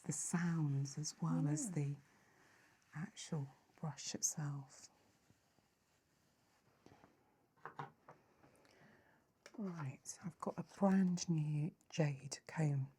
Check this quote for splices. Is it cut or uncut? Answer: cut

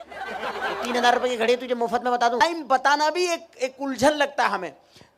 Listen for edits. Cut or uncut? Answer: uncut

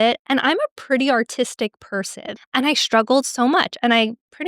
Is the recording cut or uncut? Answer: cut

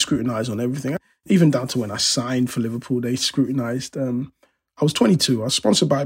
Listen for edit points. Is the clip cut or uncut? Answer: cut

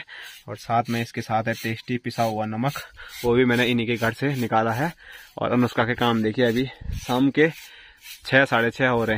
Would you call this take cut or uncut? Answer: uncut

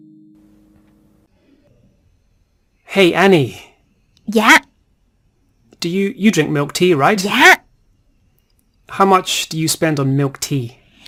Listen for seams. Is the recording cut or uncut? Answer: uncut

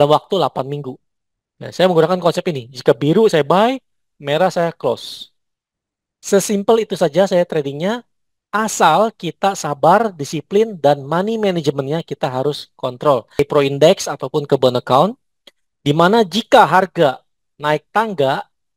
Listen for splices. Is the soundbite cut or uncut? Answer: cut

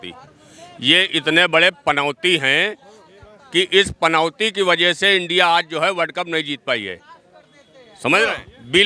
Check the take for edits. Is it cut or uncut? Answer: uncut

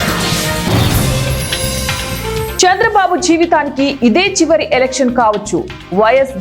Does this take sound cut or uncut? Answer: uncut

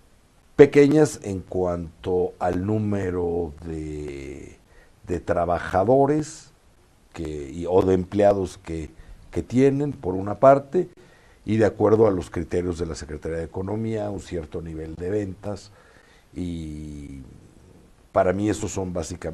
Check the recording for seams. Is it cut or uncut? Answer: cut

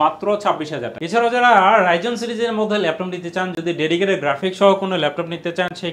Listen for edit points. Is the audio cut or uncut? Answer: uncut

